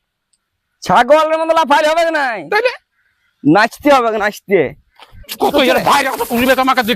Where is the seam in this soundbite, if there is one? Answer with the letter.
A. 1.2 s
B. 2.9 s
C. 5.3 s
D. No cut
C